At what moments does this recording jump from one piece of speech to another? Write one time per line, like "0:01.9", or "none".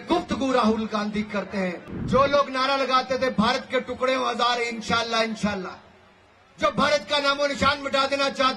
0:01.9